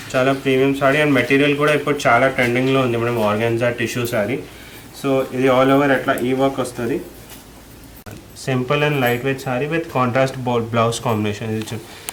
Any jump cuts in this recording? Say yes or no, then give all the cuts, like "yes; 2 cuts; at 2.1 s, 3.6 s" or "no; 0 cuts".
yes; 1 cut; at 8.3 s